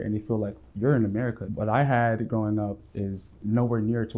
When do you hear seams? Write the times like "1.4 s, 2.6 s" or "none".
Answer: 1.4 s